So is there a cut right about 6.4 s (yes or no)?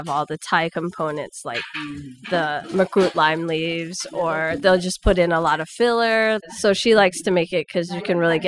yes